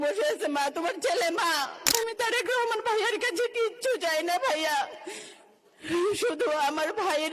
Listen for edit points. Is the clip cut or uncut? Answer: cut